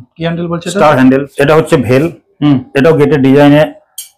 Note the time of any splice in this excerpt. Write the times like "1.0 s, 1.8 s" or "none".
1.4 s